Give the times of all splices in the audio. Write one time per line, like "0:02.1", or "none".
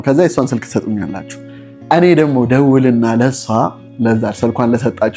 none